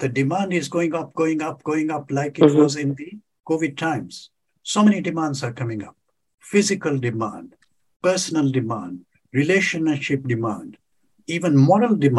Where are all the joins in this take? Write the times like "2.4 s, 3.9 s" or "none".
none